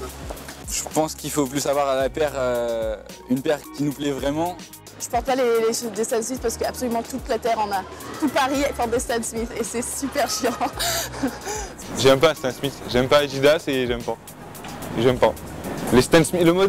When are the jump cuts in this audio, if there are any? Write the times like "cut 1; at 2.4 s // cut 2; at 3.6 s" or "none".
none